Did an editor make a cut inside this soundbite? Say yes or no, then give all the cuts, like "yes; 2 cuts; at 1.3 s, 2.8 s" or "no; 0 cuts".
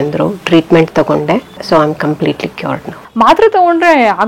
yes; 2 cuts; at 1.6 s, 3.0 s